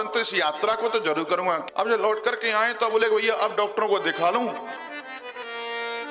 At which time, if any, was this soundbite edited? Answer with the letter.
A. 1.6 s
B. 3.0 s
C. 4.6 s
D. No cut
A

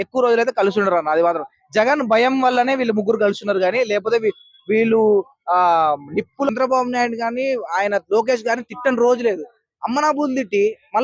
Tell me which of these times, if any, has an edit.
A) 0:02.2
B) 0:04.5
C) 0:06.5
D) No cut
C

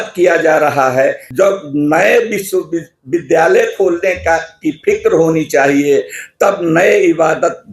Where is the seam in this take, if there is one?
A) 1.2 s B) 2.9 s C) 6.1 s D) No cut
A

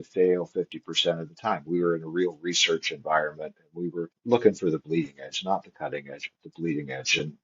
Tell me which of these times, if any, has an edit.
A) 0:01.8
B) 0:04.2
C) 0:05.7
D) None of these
B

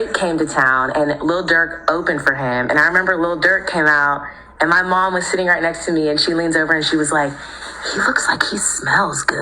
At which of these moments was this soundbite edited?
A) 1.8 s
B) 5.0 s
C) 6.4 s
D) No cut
C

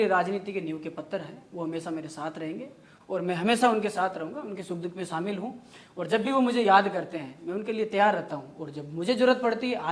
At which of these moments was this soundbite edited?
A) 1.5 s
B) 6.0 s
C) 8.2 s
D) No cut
D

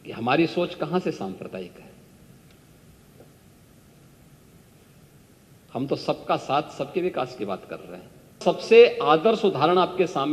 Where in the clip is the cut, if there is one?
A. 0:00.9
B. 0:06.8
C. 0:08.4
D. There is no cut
C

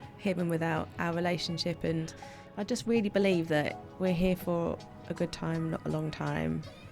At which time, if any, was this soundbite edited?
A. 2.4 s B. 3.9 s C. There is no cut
A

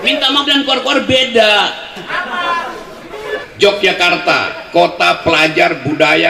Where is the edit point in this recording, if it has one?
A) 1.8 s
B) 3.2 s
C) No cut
B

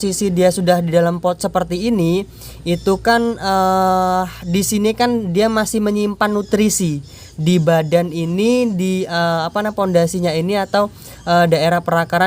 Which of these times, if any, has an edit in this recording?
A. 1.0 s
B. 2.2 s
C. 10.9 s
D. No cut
D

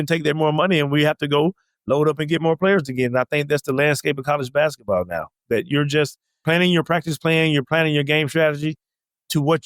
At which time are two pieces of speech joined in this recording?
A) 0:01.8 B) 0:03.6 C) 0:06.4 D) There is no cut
C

